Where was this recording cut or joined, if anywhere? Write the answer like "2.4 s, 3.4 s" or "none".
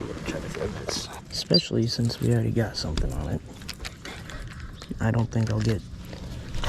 1.2 s